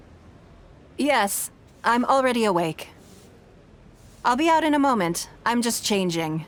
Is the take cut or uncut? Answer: uncut